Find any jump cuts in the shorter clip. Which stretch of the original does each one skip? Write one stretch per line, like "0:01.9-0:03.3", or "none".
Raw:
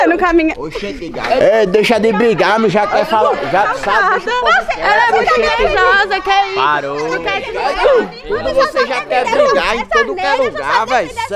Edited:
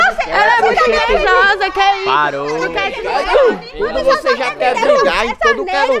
none